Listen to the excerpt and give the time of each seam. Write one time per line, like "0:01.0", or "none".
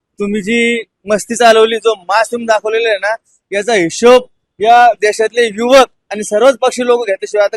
none